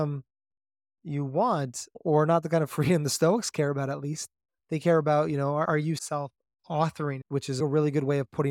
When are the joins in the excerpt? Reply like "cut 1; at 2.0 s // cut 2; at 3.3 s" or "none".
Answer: cut 1; at 1.9 s // cut 2; at 5.7 s // cut 3; at 7.6 s